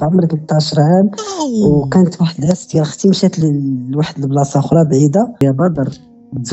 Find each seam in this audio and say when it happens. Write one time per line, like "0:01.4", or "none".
0:05.4